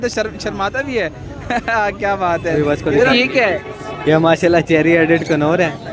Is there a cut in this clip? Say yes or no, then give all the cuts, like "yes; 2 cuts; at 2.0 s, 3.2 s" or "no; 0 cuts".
yes; 1 cut; at 2.8 s